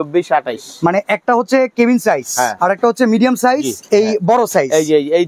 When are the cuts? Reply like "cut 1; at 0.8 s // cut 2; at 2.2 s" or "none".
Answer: cut 1; at 2.5 s // cut 2; at 3.7 s